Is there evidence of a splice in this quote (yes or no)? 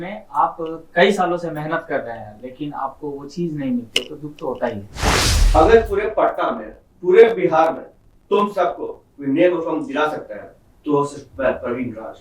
yes